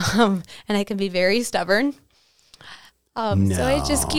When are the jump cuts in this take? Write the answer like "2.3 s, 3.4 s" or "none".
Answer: none